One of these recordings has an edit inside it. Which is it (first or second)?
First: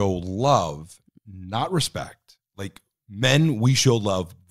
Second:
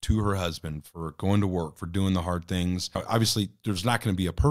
second